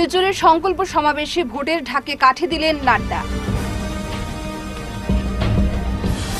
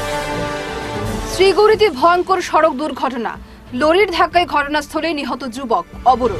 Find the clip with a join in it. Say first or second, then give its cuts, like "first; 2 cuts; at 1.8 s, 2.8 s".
second; 1 cut; at 0.9 s